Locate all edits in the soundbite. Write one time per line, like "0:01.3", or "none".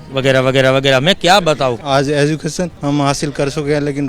0:01.8
0:02.7